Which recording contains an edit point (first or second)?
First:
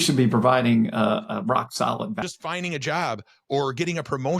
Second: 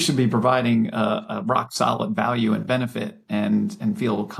first